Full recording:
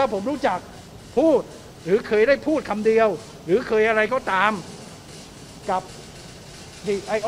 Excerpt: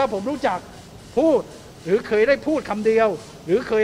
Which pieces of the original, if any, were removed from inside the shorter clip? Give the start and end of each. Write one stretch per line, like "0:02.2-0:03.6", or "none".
none